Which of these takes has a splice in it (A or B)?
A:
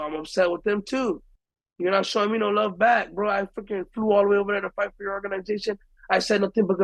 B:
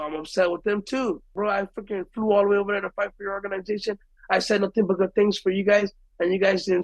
B